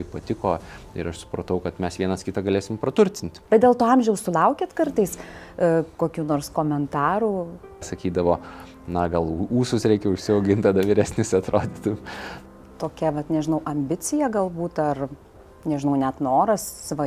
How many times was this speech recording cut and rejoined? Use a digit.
3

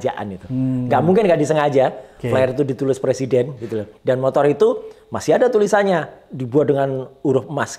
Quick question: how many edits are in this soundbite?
1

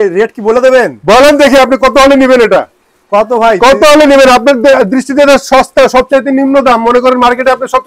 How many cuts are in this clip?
0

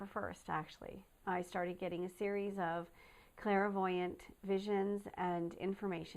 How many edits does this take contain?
1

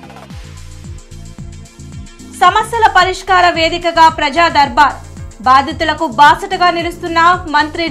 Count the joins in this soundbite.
1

